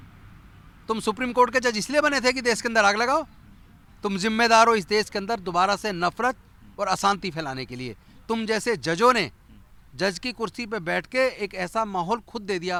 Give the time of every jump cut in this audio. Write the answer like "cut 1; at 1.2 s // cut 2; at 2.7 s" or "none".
none

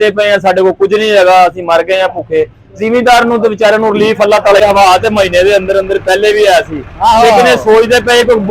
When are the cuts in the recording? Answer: cut 1; at 4.6 s

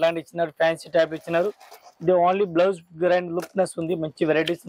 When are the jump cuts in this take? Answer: none

